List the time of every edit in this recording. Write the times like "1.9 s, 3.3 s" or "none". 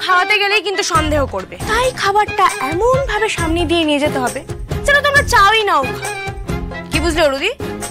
1.6 s